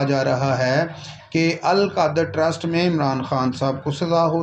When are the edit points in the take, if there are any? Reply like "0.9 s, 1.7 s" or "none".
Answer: none